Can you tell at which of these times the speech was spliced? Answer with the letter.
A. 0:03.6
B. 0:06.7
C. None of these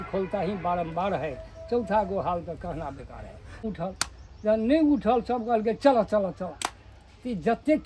A